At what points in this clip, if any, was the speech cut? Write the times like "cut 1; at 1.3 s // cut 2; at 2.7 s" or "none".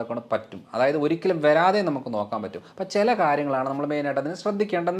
none